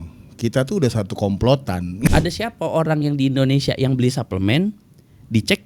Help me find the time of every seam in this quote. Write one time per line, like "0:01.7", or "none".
0:02.1

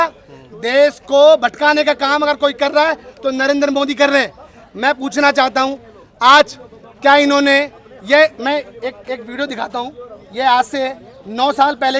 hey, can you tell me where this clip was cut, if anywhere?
none

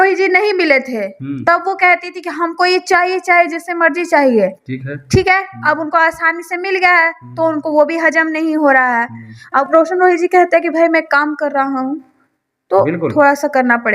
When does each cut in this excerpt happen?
0:09.7

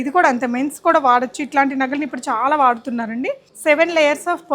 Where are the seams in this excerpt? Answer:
0:03.5

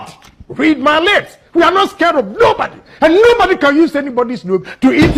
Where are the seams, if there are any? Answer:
none

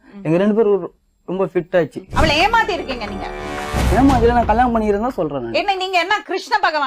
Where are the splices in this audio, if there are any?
0:02.0

